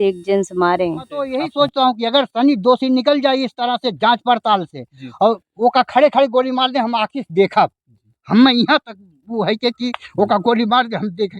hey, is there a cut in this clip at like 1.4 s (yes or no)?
yes